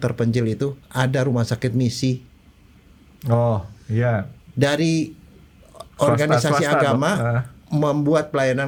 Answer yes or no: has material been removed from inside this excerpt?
no